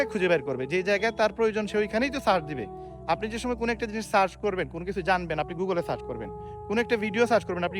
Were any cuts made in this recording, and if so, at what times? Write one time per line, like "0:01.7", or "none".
none